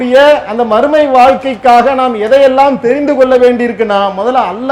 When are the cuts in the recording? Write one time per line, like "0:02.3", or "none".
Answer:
none